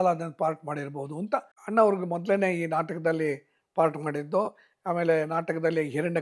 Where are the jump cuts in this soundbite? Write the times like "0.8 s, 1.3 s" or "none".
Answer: 1.6 s